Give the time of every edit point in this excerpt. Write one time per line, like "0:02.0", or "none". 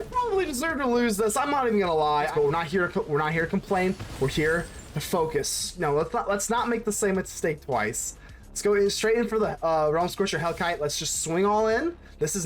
0:02.3
0:05.7